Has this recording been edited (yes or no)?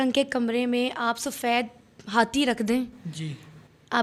no